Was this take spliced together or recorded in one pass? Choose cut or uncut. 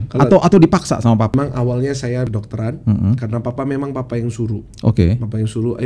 cut